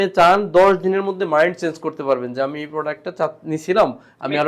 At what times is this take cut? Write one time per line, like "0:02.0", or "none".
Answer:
none